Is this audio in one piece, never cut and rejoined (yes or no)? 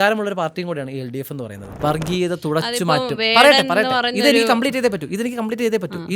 no